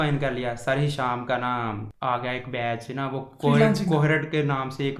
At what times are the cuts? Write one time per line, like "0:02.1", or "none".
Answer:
0:01.9